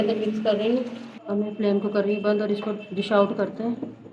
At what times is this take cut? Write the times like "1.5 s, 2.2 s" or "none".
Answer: 1.0 s